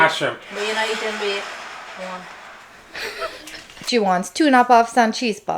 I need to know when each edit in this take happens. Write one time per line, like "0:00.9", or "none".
0:03.8